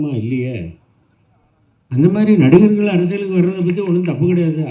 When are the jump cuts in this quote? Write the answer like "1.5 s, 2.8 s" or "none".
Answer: none